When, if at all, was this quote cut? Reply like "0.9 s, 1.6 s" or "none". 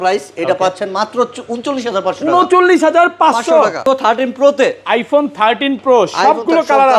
3.9 s

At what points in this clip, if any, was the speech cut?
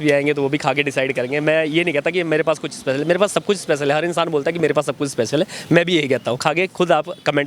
6.4 s

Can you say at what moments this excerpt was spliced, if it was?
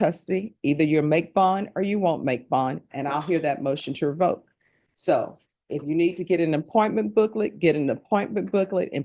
none

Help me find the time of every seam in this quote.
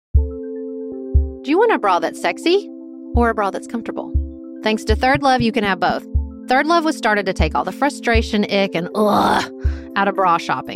1.3 s

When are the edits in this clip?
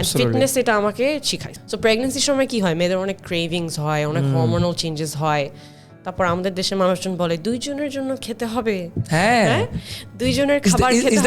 1.6 s

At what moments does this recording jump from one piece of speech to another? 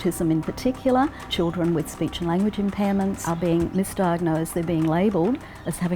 3.3 s

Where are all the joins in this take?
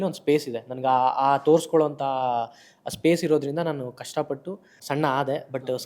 4.7 s

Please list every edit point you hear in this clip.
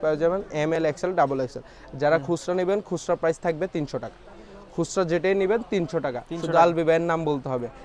none

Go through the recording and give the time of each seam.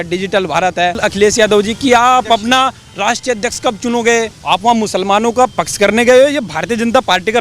1.0 s, 4.4 s

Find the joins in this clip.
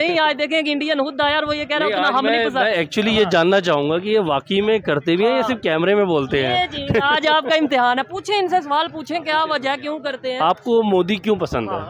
none

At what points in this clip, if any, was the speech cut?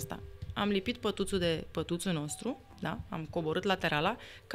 none

